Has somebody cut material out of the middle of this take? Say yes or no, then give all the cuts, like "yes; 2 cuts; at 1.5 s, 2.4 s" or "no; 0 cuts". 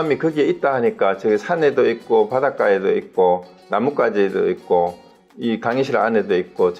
no; 0 cuts